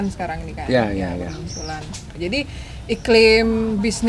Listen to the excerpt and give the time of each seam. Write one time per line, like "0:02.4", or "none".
0:02.0